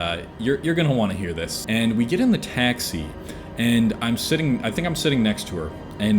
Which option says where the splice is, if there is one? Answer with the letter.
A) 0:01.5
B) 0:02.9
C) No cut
A